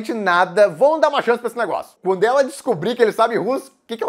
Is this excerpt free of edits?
no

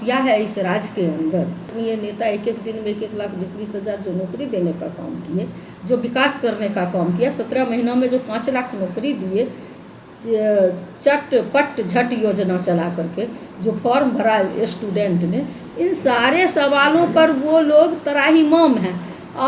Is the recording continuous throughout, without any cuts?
no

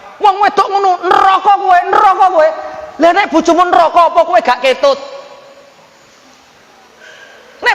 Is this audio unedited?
yes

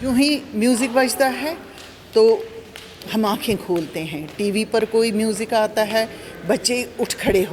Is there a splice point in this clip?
no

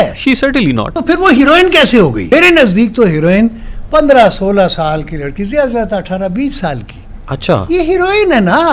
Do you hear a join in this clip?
yes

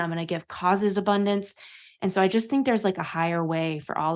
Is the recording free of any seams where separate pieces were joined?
yes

